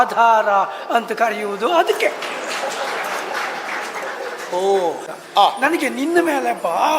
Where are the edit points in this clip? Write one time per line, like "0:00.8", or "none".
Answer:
0:05.0